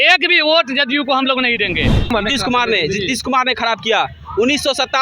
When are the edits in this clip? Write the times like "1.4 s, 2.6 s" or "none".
2.1 s